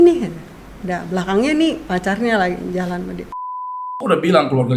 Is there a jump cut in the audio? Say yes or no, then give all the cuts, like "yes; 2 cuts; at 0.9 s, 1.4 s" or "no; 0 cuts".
yes; 1 cut; at 3.8 s